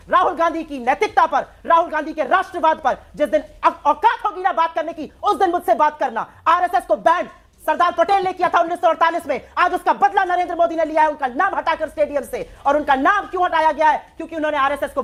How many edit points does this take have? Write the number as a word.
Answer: zero